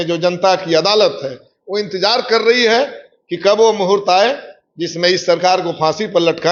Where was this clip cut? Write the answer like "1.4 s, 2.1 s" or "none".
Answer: none